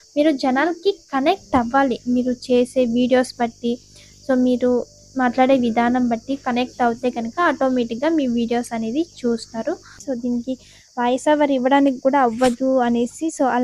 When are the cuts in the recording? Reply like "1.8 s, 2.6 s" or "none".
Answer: 9.9 s